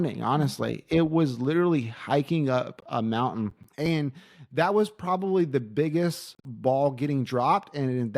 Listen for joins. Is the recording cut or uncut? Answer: cut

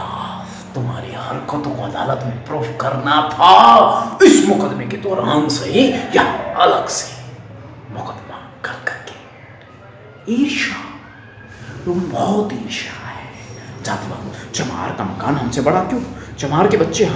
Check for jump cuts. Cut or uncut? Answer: uncut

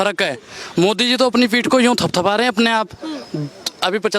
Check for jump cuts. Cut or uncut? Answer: uncut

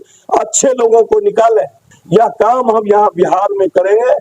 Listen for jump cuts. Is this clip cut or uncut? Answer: cut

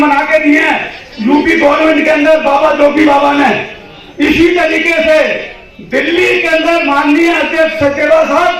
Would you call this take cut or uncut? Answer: uncut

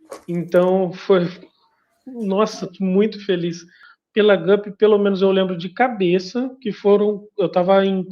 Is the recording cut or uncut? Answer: cut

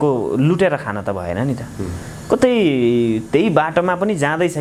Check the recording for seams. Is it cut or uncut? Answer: uncut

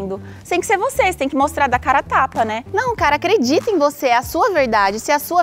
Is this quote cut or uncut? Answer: cut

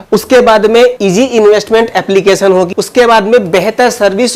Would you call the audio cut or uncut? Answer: uncut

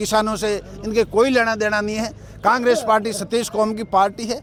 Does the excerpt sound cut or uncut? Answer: uncut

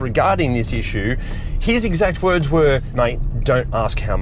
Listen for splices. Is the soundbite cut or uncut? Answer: cut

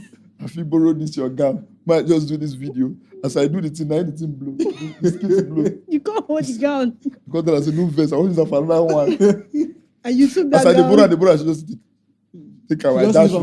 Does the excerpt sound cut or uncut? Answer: uncut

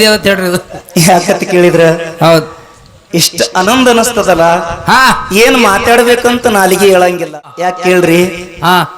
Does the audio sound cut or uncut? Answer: cut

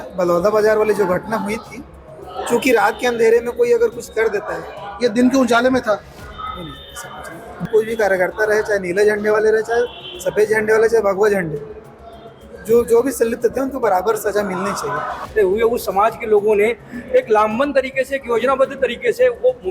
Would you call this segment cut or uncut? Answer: cut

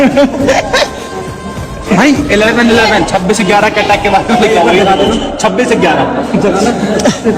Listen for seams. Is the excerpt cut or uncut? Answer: uncut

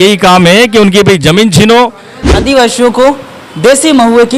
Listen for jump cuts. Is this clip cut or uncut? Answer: cut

